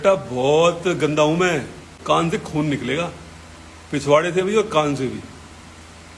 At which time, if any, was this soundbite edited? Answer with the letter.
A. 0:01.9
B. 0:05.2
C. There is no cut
A